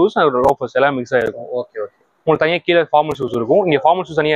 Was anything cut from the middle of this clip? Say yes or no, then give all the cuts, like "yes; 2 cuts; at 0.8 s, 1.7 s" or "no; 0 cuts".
no; 0 cuts